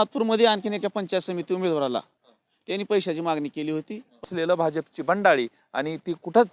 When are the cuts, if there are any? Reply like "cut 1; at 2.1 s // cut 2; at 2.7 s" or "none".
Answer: cut 1; at 4.3 s